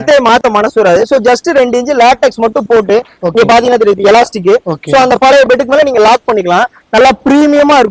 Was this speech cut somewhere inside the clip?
no; 0 cuts

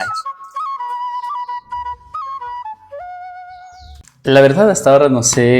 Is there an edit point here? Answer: no; 0 cuts

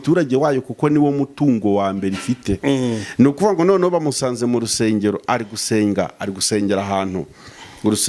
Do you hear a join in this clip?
no; 0 cuts

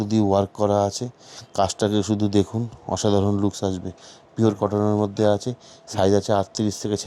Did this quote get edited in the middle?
no; 0 cuts

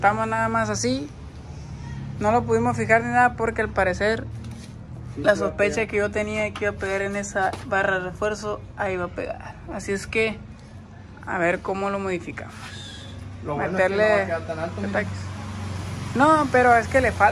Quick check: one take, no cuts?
yes; 0 cuts

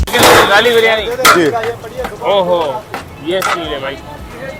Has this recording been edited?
no; 0 cuts

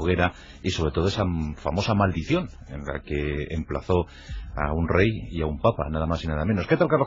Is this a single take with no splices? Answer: no; 1 cut; at 5.4 s

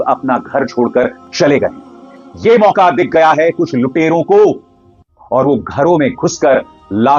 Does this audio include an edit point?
no; 0 cuts

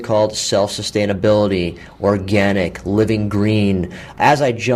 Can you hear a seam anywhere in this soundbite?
no; 0 cuts

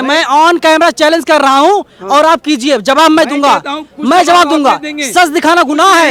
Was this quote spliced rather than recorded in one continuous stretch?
no; 0 cuts

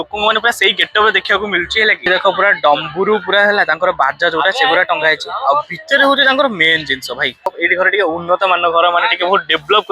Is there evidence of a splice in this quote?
yes; 2 cuts; at 2.0 s, 7.5 s

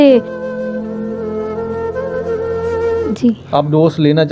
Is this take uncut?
no; 1 cut; at 3.1 s

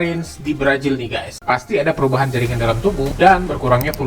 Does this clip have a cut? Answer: yes; 1 cut; at 1.4 s

